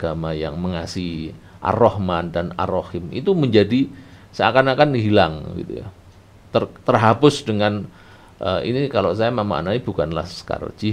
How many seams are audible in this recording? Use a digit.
0